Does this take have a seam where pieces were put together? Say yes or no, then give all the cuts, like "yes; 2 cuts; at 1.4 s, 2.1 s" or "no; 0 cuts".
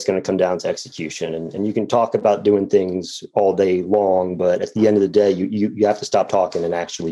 no; 0 cuts